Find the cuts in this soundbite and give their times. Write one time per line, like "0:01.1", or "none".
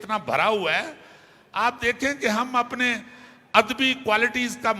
none